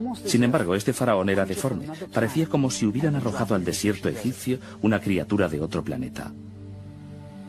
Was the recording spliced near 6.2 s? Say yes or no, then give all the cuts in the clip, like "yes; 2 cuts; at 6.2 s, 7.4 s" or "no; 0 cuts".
yes; 1 cut; at 6.2 s